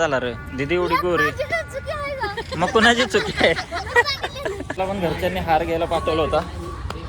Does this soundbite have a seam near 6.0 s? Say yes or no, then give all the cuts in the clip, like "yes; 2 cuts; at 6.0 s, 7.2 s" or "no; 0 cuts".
no; 2 cuts; at 2.5 s, 4.8 s